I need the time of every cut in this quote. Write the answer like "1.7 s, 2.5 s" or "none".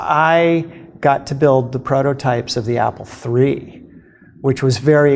none